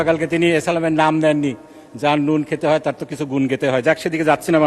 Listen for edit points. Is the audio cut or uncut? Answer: uncut